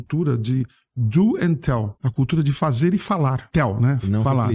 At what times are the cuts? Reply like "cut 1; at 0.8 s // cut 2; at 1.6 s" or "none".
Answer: cut 1; at 2.0 s // cut 2; at 3.5 s